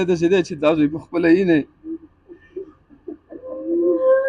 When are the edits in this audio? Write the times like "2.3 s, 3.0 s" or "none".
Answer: none

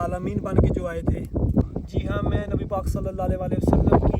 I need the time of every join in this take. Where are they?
1.6 s

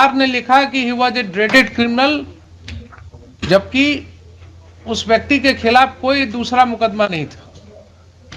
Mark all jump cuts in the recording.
none

